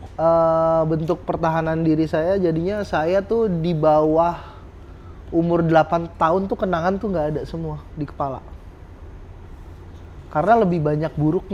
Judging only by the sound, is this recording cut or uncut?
uncut